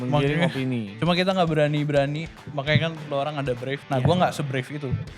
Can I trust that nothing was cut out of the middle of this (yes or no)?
no